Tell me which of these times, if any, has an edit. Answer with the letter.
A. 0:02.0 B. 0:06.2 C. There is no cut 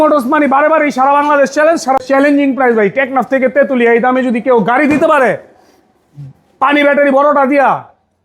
A